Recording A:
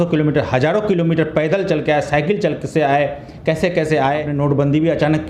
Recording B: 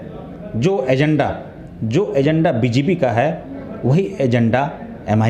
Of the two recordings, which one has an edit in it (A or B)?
A